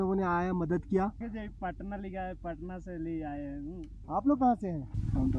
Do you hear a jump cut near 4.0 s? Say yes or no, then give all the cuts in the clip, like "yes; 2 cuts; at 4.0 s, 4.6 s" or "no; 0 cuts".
yes; 2 cuts; at 1.2 s, 4.0 s